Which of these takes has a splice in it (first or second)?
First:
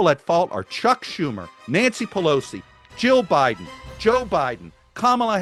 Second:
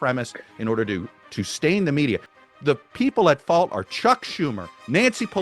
second